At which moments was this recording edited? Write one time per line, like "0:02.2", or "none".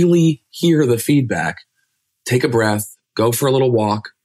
none